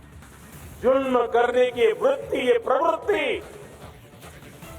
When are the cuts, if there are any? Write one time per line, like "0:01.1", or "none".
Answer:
0:03.7